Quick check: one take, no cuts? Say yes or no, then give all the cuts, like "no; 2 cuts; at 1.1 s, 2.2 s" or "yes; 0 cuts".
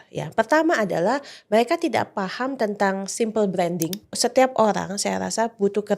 no; 1 cut; at 4.2 s